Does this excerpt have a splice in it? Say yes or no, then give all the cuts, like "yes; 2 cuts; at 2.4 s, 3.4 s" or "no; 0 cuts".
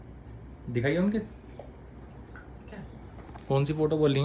no; 0 cuts